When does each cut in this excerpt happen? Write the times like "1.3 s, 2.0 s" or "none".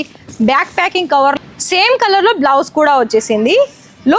1.4 s